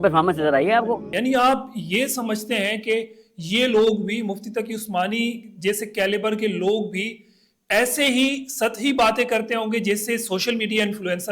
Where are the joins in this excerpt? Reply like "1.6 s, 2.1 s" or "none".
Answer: 1.1 s